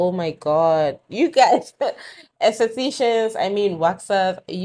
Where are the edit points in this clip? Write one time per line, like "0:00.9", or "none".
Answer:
none